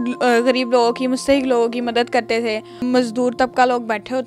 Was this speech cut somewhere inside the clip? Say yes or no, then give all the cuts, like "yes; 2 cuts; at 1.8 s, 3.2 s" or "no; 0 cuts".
yes; 1 cut; at 2.8 s